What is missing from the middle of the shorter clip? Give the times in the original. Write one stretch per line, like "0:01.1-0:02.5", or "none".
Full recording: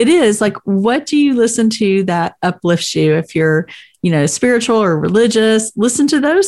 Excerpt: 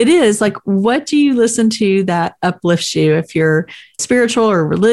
0:04.0-0:04.3

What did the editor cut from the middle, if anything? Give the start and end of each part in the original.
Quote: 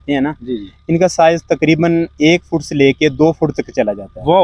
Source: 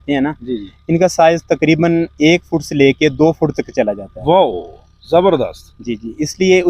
none

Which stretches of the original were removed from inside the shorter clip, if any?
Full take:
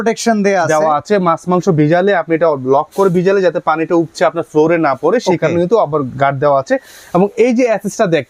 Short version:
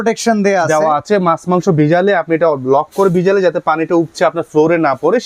none

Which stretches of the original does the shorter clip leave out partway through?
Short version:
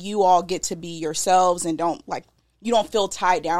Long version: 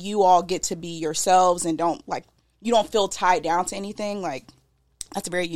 none

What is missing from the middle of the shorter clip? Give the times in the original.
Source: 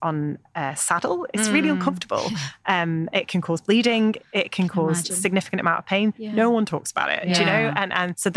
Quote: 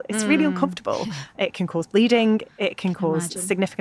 0:02.6-0:03.1

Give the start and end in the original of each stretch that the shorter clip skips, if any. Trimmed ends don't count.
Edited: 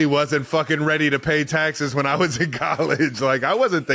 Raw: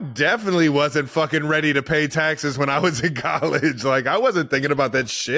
none

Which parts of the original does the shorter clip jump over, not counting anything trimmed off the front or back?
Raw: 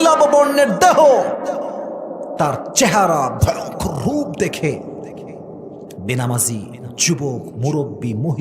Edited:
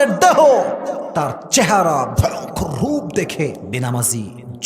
0:01.7-0:02.3
0:04.9-0:06.0

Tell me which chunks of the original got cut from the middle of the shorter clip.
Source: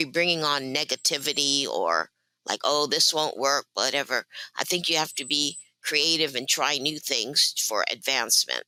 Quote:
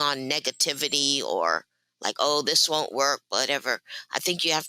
none

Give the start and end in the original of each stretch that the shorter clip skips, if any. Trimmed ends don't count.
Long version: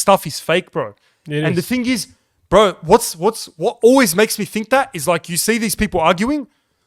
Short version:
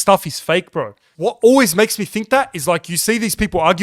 0:01.1-0:03.5

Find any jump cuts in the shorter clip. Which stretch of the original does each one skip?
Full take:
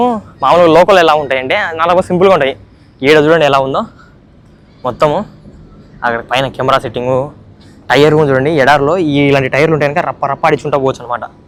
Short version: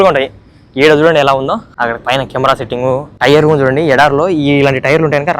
0:03.9-0:05.9
0:07.3-0:07.8

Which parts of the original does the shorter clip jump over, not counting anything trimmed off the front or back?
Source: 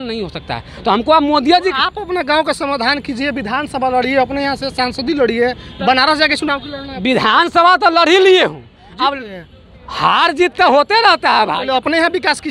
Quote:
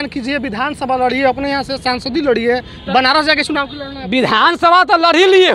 none

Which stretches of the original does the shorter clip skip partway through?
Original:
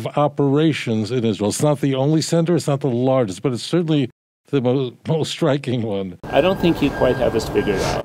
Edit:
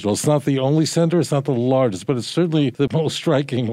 0:04.2-0:05.0

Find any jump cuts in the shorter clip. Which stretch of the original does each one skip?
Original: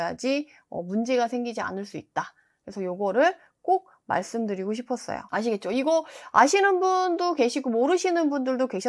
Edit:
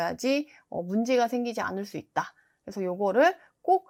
none

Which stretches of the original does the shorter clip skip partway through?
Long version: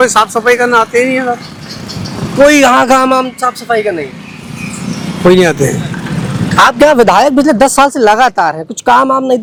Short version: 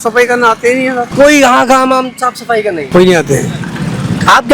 0:01.4-0:02.3
0:04.1-0:05.2

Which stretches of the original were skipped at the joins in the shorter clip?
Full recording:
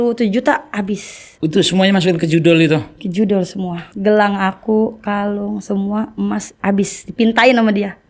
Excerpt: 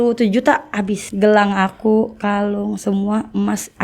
0:01.0-0:03.9

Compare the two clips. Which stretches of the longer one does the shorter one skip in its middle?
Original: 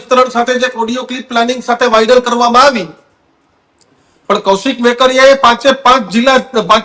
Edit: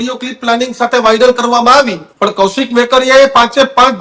0:02.9-0:04.1

